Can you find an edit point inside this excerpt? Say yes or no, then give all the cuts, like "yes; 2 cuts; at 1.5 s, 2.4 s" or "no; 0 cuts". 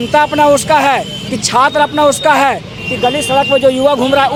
no; 0 cuts